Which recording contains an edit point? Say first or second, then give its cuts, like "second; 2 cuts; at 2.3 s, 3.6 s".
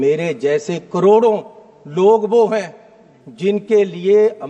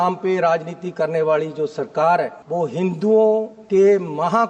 second; 2 cuts; at 2.4 s, 3.6 s